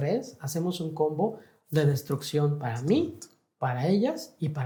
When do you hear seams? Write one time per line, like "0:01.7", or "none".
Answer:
none